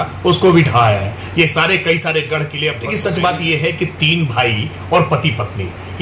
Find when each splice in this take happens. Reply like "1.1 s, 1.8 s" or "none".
2.9 s